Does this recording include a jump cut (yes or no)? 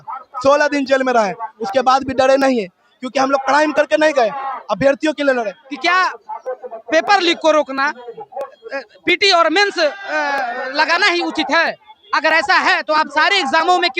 yes